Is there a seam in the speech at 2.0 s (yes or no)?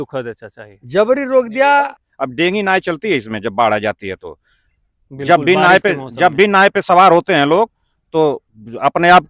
yes